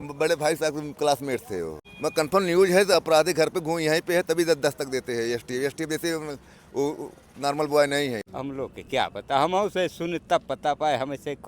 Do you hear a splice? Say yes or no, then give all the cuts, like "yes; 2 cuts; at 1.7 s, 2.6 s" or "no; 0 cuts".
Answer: yes; 2 cuts; at 1.8 s, 8.2 s